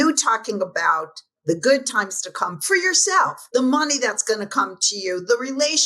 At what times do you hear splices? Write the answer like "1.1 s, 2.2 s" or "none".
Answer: 3.4 s